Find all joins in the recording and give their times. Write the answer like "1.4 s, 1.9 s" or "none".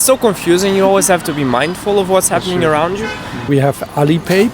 3.5 s